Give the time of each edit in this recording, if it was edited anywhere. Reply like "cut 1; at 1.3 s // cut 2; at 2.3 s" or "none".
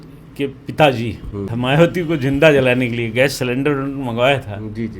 cut 1; at 1.5 s